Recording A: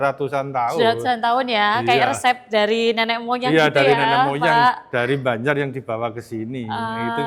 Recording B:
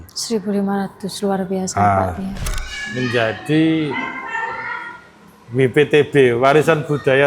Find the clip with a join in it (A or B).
B